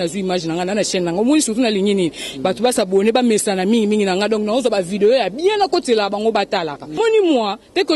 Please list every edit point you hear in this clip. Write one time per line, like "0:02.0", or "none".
0:07.0